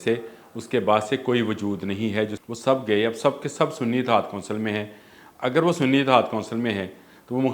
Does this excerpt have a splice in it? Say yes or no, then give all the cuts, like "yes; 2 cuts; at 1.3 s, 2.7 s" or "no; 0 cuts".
yes; 1 cut; at 2.4 s